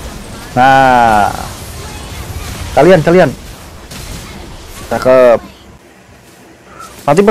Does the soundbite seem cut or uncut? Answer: cut